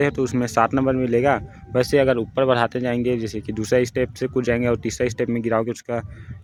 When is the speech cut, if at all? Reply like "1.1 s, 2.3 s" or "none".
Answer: none